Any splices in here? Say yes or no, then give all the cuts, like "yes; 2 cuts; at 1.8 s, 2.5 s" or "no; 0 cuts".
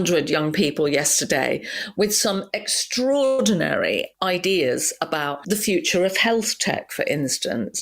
yes; 1 cut; at 4.2 s